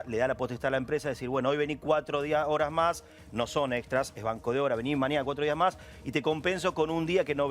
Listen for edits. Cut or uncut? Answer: uncut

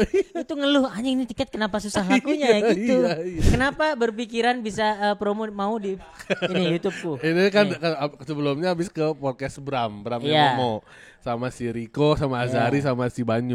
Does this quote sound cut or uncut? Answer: cut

